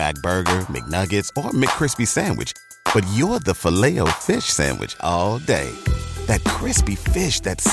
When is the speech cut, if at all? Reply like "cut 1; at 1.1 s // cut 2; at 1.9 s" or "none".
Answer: none